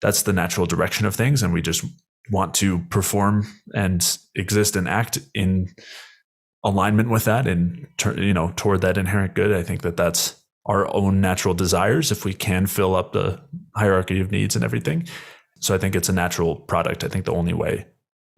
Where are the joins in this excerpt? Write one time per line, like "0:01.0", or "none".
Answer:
0:15.5